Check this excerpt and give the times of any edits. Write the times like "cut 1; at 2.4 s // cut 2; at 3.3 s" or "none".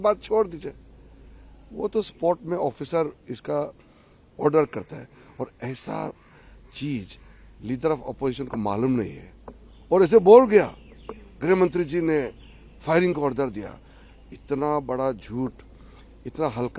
none